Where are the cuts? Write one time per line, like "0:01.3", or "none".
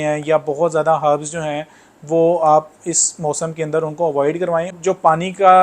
0:04.7